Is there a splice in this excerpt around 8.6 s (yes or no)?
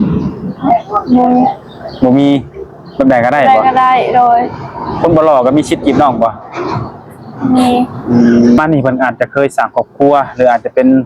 yes